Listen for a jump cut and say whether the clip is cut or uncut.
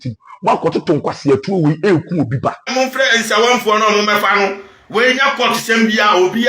cut